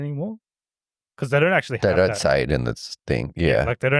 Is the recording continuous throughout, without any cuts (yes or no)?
yes